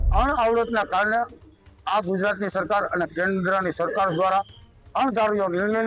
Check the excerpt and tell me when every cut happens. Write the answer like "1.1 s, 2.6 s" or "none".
none